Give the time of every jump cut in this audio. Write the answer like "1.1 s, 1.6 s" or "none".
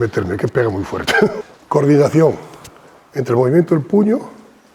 1.5 s

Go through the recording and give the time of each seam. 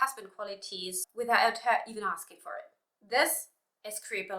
1.0 s

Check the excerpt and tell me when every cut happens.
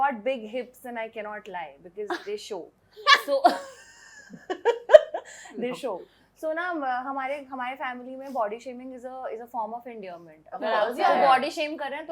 none

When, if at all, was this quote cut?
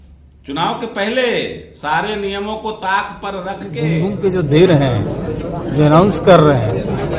3.8 s

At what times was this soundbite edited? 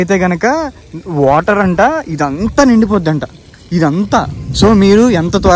none

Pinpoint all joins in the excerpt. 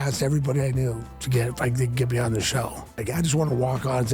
3.0 s

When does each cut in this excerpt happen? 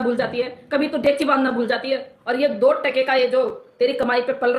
2.1 s

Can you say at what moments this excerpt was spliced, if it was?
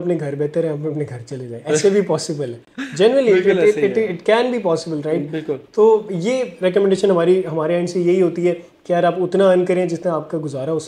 none

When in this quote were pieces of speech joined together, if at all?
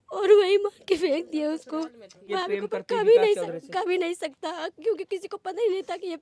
2.2 s

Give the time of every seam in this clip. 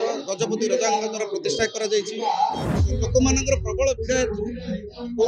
2.8 s

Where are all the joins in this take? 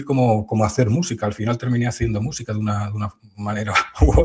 none

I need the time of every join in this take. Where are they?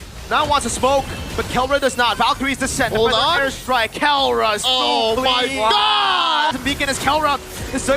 6.5 s

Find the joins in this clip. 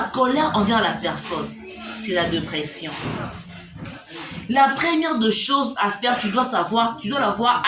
3.9 s

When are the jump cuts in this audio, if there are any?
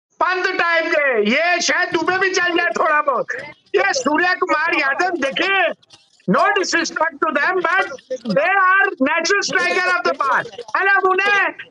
none

